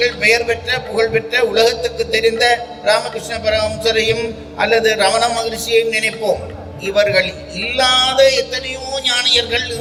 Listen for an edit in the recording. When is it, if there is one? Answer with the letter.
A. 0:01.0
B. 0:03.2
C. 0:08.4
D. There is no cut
D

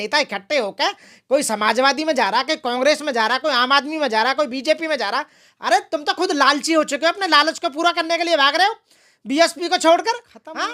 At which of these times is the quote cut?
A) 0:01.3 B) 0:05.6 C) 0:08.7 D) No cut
D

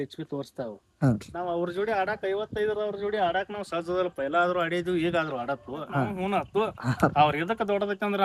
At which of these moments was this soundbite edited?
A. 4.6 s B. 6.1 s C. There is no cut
B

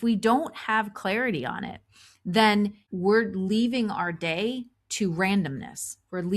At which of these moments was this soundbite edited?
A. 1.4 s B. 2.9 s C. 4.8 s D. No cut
B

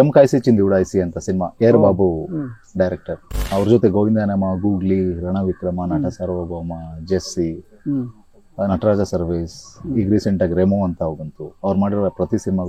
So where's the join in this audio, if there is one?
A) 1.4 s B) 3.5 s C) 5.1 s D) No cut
B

